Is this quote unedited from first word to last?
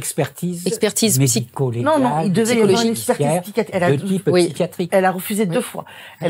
yes; 0 cuts

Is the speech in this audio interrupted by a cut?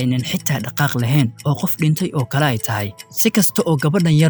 no; 0 cuts

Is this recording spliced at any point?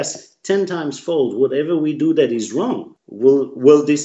yes; 1 cut; at 3.1 s

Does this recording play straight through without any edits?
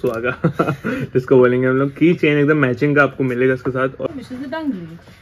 no; 1 cut; at 4.0 s

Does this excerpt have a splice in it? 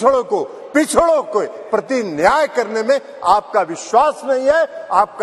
no; 0 cuts

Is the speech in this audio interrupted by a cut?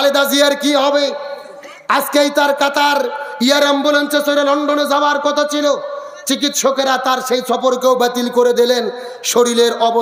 no; 0 cuts

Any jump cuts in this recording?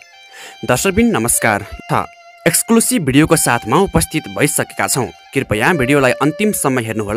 yes; 1 cut; at 1.7 s

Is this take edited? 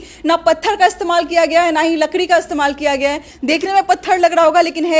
yes; 1 cut; at 3.3 s

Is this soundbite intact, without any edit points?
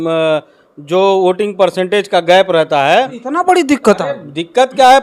no; 1 cut; at 3.2 s

